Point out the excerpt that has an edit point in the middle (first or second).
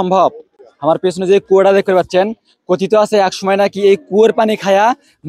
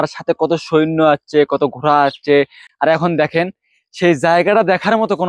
second